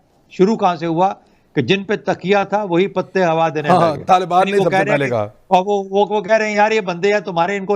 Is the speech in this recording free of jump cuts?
yes; 0 cuts

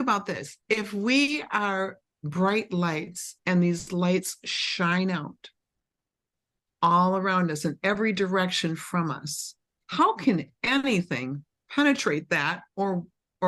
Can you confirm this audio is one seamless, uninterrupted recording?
yes; 0 cuts

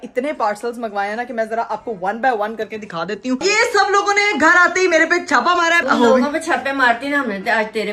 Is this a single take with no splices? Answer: no; 2 cuts; at 3.4 s, 5.8 s

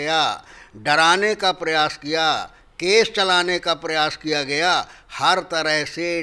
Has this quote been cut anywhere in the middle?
no; 0 cuts

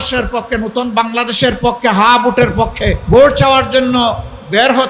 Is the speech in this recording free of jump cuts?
no; 1 cut; at 3.0 s

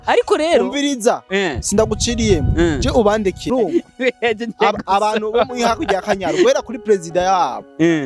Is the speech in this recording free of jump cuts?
no; 1 cut; at 3.5 s

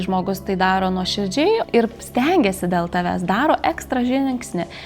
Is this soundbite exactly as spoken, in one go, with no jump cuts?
no; 1 cut; at 1.6 s

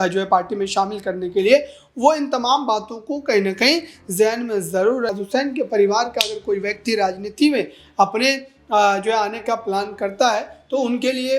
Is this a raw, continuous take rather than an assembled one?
no; 1 cut; at 5.1 s

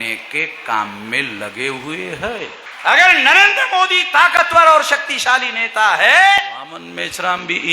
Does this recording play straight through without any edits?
no; 2 cuts; at 2.6 s, 6.6 s

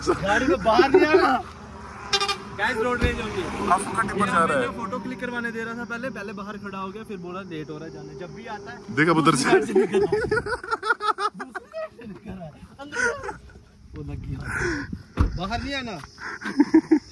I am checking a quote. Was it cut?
no; 0 cuts

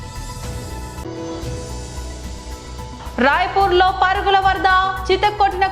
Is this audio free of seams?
yes; 0 cuts

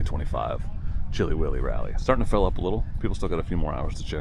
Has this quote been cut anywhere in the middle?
no; 0 cuts

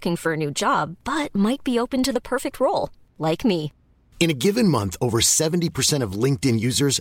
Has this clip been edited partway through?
no; 0 cuts

